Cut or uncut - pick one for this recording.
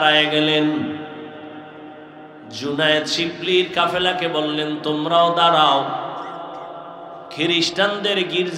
uncut